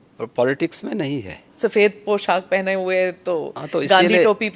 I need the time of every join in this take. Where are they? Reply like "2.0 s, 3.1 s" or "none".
1.5 s

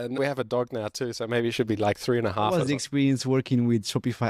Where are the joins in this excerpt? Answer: 2.5 s

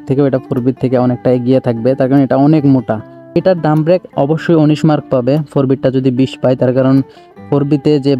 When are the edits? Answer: 3.3 s

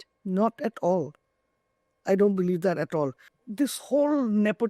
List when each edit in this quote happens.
3.3 s

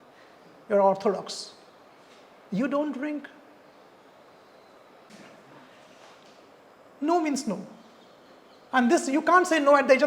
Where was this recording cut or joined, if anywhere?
5.1 s

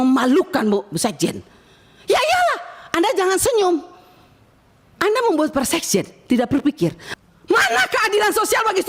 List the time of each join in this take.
7.1 s

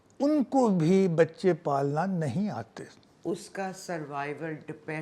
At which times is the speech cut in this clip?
3.0 s

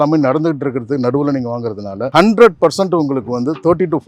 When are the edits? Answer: 2.1 s

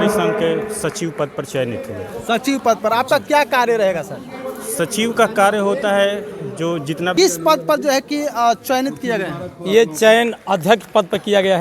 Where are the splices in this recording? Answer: 7.1 s

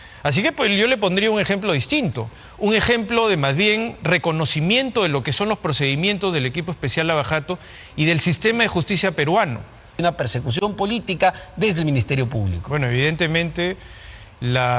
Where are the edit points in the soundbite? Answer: 10.0 s

